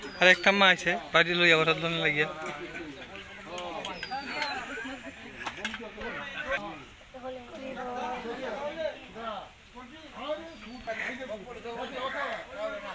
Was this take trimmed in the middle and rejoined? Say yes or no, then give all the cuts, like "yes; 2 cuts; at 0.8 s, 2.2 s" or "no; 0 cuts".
yes; 2 cuts; at 6.1 s, 11.0 s